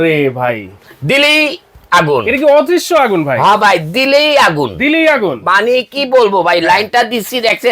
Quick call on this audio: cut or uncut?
uncut